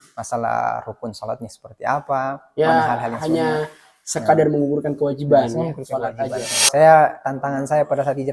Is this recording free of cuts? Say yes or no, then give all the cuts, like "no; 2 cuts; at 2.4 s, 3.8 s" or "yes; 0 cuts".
no; 1 cut; at 6.5 s